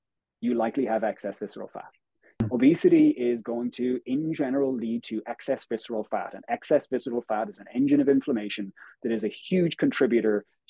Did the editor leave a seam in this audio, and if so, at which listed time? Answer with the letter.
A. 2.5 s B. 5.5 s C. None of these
A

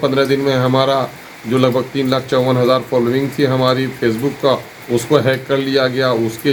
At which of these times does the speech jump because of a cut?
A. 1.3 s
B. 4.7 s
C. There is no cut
C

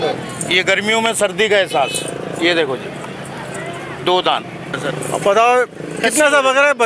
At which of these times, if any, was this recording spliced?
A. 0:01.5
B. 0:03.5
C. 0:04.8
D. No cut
C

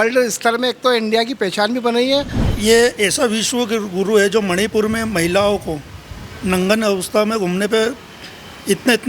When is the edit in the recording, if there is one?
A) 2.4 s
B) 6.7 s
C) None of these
A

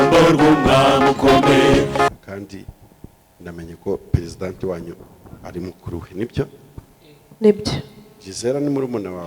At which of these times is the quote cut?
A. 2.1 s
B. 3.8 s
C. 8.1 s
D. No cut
A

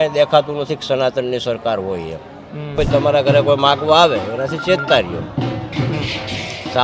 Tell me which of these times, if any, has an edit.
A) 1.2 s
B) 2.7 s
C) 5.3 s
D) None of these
B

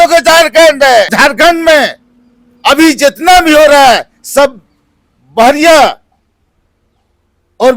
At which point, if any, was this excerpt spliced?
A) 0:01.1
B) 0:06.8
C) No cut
A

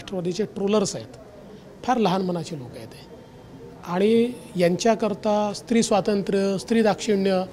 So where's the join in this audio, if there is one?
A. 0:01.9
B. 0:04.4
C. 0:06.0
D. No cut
D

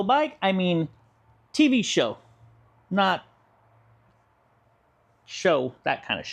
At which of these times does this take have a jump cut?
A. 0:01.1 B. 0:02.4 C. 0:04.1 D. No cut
D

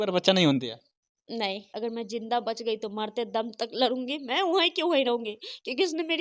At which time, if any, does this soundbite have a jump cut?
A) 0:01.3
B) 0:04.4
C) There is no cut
A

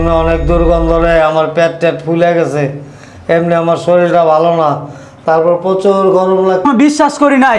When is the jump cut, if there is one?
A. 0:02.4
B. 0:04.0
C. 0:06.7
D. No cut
C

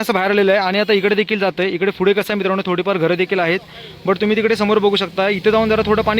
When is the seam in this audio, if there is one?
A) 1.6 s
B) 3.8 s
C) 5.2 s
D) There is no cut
D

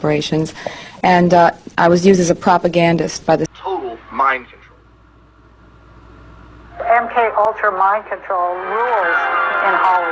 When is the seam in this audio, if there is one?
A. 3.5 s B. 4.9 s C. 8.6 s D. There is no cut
A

